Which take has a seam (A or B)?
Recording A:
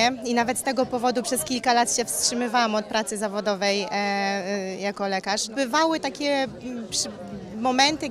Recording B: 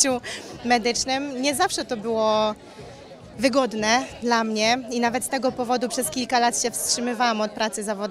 A